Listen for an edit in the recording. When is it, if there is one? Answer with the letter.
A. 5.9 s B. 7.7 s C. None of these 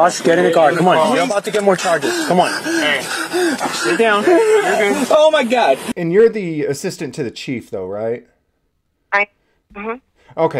A